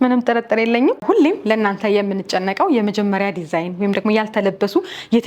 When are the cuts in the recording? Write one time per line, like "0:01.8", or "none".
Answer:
0:01.0